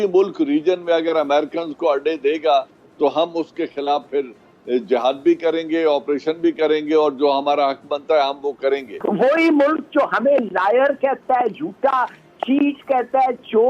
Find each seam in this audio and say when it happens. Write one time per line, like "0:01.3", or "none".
0:08.9